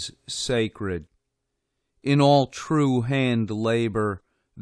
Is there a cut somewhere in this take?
yes; 1 cut; at 2.6 s

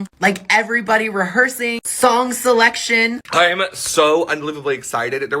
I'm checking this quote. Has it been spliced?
yes; 1 cut; at 3.2 s

